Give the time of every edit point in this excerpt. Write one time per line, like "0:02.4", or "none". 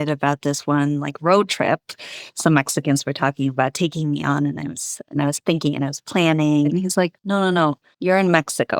0:06.7
0:07.9